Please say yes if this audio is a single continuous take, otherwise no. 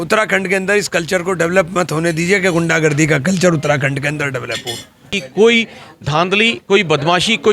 no